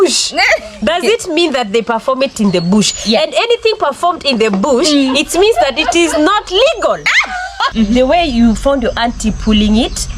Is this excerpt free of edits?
no; 1 cut; at 7.7 s

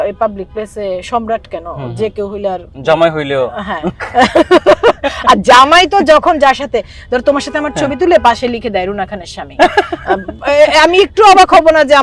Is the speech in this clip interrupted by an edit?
no; 0 cuts

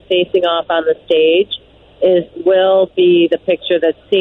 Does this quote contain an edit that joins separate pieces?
no; 0 cuts

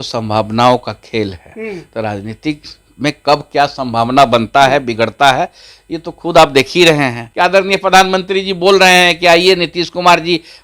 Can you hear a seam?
yes; 1 cut; at 7.2 s

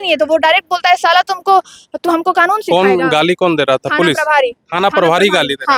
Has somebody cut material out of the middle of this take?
no; 0 cuts

